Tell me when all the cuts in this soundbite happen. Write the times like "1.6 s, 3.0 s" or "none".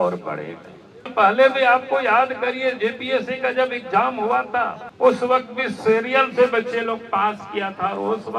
1.1 s, 4.8 s